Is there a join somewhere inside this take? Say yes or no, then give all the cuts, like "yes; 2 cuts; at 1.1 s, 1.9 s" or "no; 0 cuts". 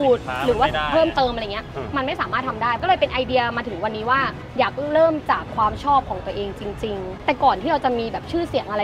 yes; 3 cuts; at 2.8 s, 4.4 s, 7.1 s